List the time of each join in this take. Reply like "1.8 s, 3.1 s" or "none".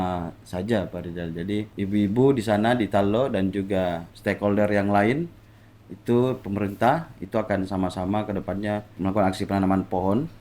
1.7 s, 4.1 s, 9.0 s